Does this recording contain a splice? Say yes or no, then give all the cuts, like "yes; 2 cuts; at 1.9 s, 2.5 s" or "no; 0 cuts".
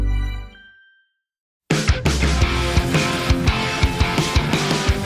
yes; 1 cut; at 1.7 s